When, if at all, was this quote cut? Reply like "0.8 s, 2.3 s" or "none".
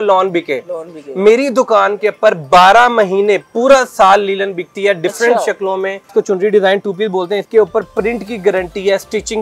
6.1 s, 7.4 s